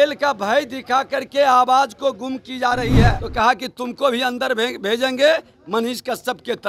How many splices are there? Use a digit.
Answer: 1